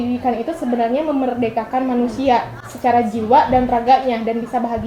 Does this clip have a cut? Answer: no; 0 cuts

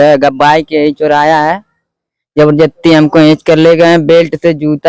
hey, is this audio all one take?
yes; 0 cuts

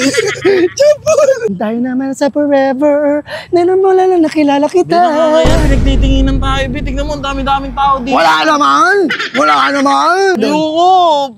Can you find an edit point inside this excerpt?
yes; 2 cuts; at 1.5 s, 10.4 s

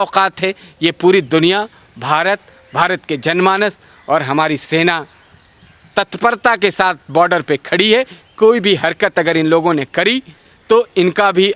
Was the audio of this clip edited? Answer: no; 0 cuts

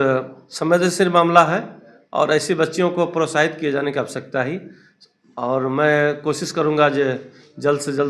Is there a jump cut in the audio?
no; 0 cuts

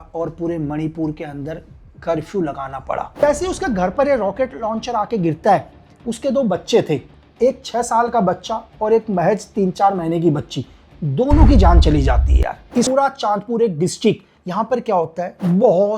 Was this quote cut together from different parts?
yes; 2 cuts; at 3.1 s, 12.9 s

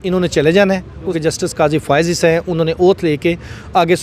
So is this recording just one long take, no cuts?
no; 1 cut; at 1.1 s

